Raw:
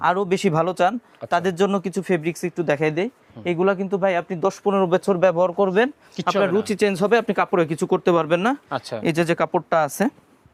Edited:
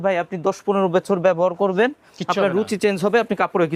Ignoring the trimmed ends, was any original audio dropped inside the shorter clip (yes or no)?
no